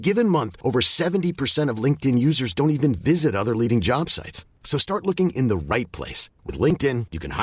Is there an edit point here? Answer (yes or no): no